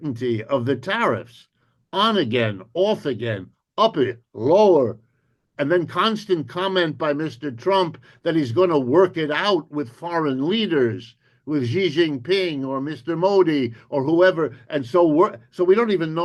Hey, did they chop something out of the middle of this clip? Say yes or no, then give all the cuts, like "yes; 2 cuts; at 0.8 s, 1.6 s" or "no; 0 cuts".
no; 0 cuts